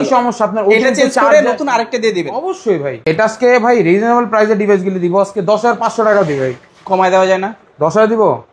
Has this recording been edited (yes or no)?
yes